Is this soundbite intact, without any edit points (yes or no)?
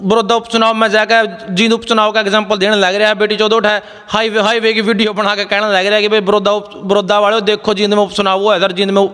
yes